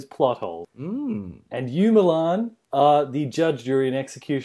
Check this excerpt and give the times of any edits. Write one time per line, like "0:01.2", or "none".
0:02.6